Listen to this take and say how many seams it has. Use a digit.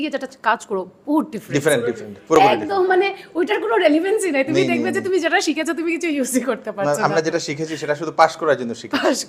0